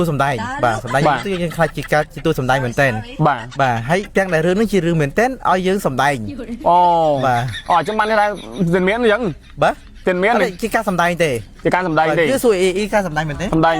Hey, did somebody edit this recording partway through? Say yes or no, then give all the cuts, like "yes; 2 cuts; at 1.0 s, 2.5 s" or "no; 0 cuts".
yes; 1 cut; at 4.1 s